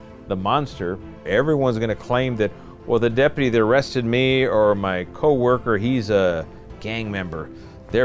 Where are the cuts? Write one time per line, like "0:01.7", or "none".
0:01.3